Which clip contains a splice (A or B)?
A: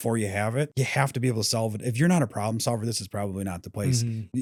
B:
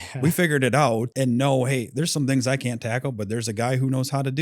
B